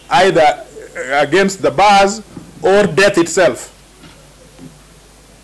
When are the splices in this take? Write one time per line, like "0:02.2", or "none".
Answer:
none